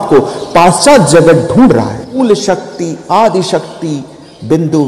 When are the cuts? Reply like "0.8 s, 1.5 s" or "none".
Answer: 2.2 s